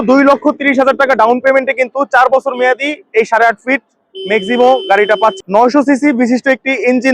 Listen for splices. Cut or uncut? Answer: cut